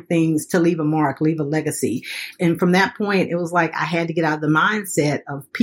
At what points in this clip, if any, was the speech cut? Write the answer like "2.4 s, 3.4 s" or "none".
2.3 s